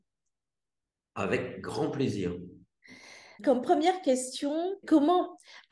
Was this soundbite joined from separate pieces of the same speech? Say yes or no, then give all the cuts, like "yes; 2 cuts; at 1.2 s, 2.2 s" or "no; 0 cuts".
yes; 2 cuts; at 3.3 s, 4.8 s